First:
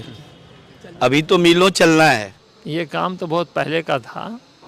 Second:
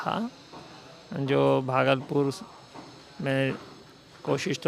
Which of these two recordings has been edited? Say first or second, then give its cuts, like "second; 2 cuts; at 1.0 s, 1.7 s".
first; 1 cut; at 2.7 s